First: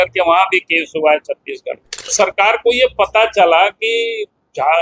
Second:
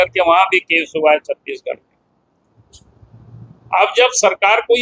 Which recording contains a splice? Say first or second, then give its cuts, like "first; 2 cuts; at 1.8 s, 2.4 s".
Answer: first; 1 cut; at 2.1 s